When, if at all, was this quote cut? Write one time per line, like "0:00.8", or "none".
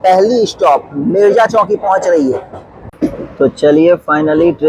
0:03.0